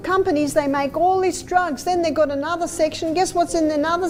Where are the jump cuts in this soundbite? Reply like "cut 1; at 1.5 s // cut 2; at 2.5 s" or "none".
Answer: none

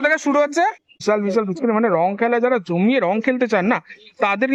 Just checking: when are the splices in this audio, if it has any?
cut 1; at 0.9 s

